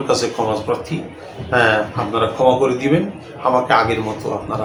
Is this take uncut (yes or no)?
yes